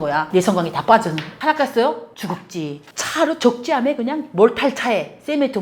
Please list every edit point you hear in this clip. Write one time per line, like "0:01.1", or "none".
0:02.8